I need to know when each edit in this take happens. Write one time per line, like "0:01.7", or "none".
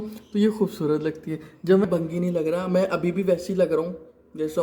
0:01.9